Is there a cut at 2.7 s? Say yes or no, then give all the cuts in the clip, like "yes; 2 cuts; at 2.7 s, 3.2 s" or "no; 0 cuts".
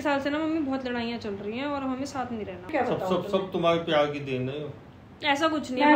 yes; 1 cut; at 2.7 s